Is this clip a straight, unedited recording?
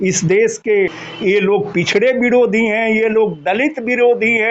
no; 1 cut; at 1.1 s

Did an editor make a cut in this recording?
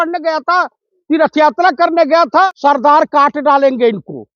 yes; 1 cut; at 2.5 s

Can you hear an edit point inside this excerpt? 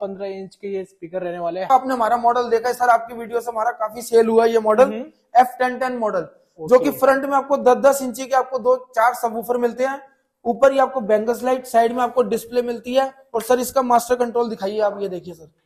yes; 1 cut; at 1.7 s

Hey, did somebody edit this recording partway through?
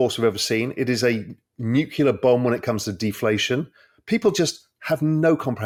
no; 0 cuts

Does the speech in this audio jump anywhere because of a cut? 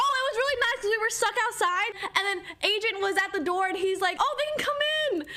no; 0 cuts

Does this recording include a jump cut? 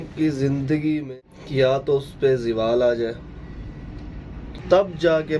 yes; 2 cuts; at 1.1 s, 4.6 s

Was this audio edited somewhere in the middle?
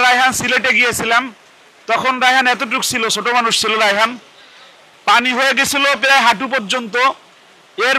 no; 0 cuts

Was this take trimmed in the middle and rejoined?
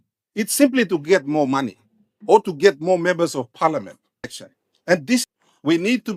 yes; 1 cut; at 5.2 s

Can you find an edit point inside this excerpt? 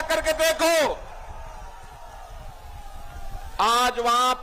no; 0 cuts

